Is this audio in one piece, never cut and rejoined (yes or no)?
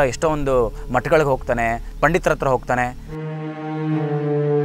yes